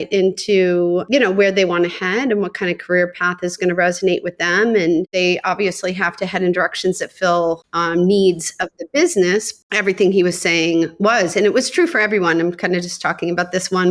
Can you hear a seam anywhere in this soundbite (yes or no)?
yes